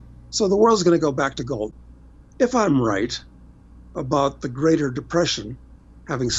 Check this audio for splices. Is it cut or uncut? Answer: cut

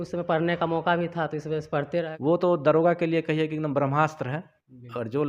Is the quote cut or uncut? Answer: cut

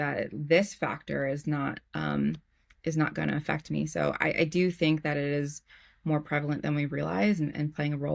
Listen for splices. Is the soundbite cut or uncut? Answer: uncut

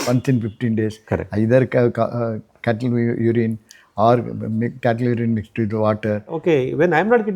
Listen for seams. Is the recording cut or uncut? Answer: cut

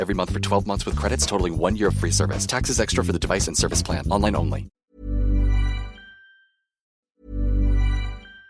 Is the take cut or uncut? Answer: cut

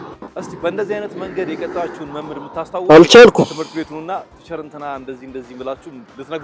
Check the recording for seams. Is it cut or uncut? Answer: uncut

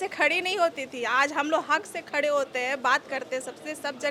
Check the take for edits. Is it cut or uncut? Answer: uncut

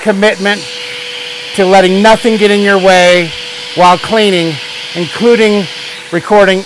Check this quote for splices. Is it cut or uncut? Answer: uncut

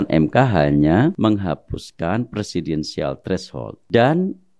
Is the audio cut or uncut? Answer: cut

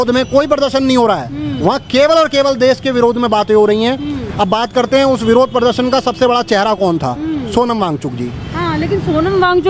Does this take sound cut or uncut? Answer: uncut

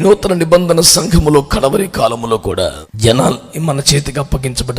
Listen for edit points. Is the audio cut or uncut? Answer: cut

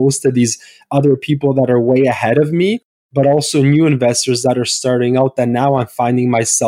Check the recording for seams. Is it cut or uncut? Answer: uncut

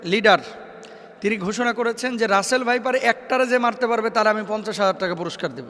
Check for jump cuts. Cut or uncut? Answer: uncut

